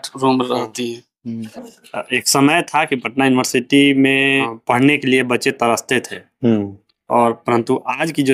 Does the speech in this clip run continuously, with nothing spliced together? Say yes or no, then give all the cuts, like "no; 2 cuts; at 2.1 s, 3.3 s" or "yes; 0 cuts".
no; 2 cuts; at 1.4 s, 4.5 s